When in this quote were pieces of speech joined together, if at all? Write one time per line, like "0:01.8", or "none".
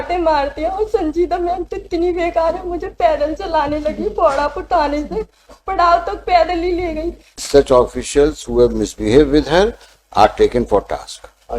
0:07.4